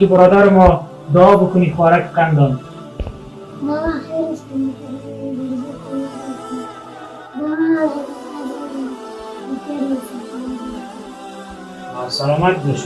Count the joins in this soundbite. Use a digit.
2